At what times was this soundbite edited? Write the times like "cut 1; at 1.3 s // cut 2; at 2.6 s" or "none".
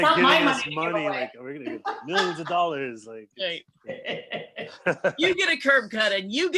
none